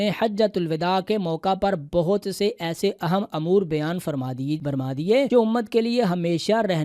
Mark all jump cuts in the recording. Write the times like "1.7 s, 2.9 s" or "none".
5.0 s

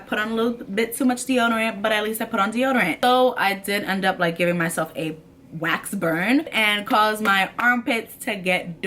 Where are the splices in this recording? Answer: 3.0 s, 6.5 s

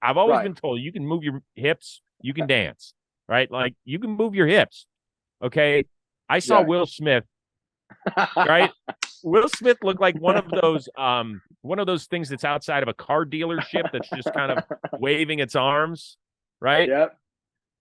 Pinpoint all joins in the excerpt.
none

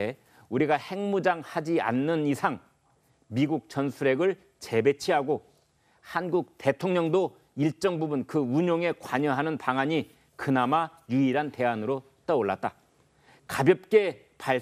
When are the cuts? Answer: 7.0 s

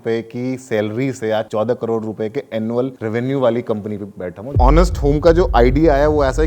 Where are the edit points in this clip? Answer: 1.5 s, 3.0 s, 4.5 s

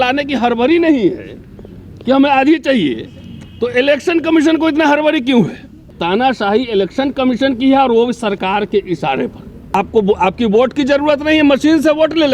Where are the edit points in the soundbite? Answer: 6.0 s, 9.7 s

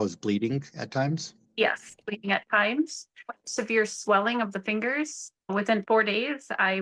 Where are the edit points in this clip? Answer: 5.3 s

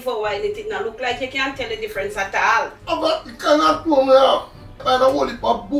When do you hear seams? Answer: 2.8 s, 4.8 s

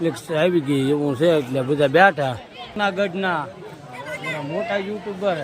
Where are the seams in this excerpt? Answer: 2.8 s

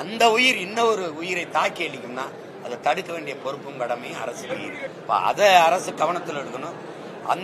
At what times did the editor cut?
4.9 s

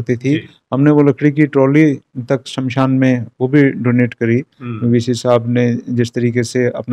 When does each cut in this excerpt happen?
none

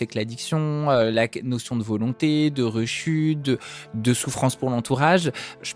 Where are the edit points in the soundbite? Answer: none

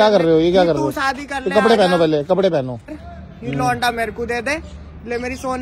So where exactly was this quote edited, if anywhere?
2.9 s

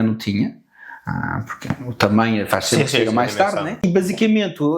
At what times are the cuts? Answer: 3.8 s

